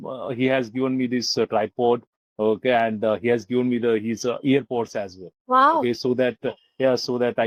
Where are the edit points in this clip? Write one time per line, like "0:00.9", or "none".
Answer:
none